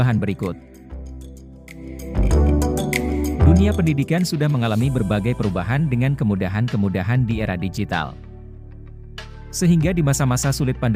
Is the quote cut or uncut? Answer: uncut